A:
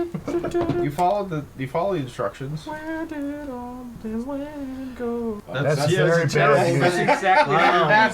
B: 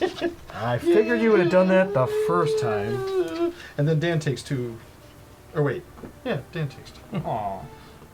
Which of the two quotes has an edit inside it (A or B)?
A